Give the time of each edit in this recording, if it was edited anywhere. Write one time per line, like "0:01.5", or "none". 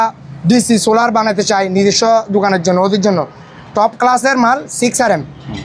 none